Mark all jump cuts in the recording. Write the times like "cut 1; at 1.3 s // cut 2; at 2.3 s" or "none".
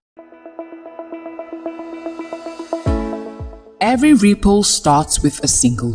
none

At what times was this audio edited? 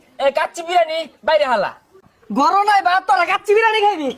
cut 1; at 2.0 s

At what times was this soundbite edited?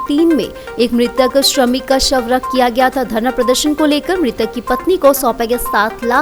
none

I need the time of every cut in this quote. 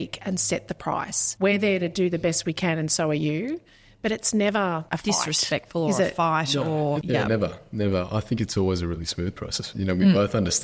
cut 1; at 1.2 s // cut 2; at 4.9 s // cut 3; at 7.0 s // cut 4; at 9.6 s

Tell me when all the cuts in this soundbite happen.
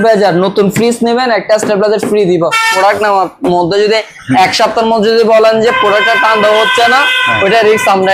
cut 1; at 2.7 s

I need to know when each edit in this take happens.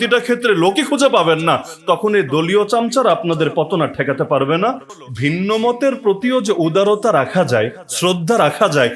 cut 1; at 4.8 s

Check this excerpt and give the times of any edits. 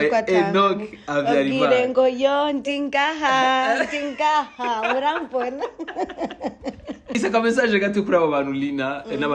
cut 1; at 7.1 s

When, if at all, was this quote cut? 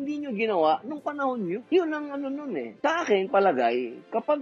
cut 1; at 1.6 s // cut 2; at 2.7 s

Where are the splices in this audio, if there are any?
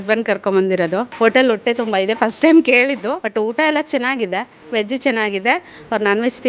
cut 1; at 1.1 s // cut 2; at 3.2 s // cut 3; at 4.6 s

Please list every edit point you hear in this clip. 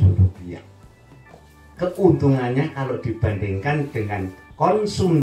none

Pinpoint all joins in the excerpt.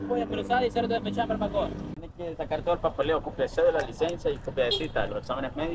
cut 1; at 2.0 s

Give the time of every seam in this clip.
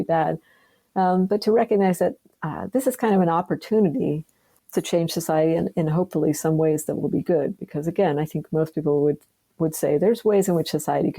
cut 1; at 4.5 s

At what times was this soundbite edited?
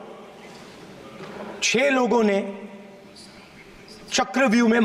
none

